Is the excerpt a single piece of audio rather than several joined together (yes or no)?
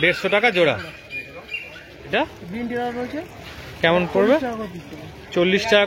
no